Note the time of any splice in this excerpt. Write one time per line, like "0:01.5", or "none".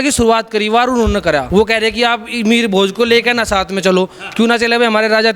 0:01.5